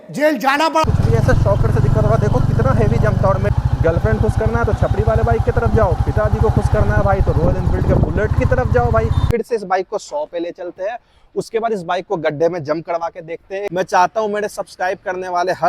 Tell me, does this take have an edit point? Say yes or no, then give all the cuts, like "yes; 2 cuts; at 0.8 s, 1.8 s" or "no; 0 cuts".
yes; 4 cuts; at 0.8 s, 3.5 s, 9.2 s, 13.7 s